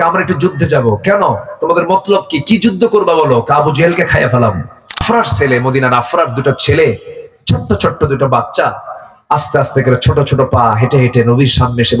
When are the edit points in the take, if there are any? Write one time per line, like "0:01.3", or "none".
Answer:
0:05.0